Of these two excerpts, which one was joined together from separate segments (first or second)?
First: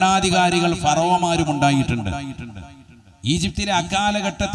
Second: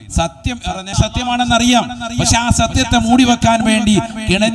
second